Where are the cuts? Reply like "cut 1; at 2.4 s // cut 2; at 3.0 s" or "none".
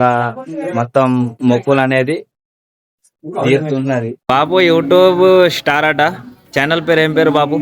cut 1; at 4.1 s